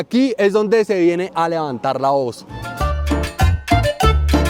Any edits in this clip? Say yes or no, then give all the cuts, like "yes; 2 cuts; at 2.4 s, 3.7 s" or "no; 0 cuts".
no; 0 cuts